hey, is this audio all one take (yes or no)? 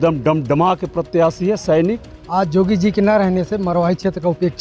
no